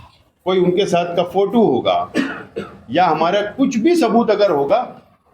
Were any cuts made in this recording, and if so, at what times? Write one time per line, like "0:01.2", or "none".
none